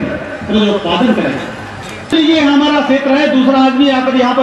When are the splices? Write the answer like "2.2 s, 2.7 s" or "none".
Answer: 2.1 s